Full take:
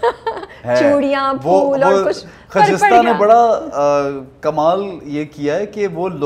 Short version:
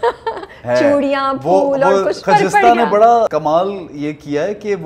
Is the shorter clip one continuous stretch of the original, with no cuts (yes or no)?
no